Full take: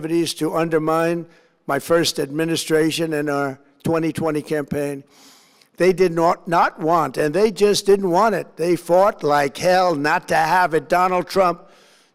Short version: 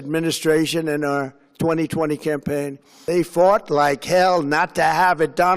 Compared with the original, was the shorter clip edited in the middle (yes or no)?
yes